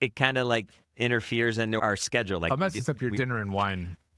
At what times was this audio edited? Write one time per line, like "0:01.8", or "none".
none

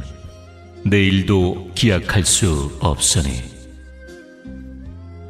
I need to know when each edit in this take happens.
0:03.5

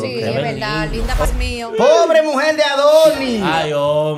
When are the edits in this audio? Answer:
0:01.3

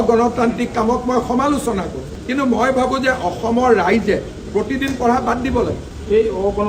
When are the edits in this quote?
none

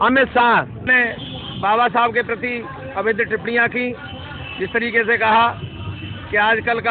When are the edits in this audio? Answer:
0:00.9

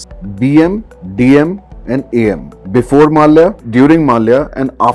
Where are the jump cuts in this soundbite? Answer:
0:03.6

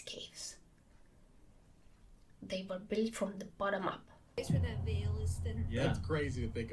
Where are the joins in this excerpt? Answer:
0:04.4

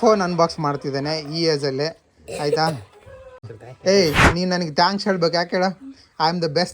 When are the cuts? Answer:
0:03.6

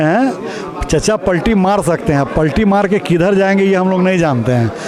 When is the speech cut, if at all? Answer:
none

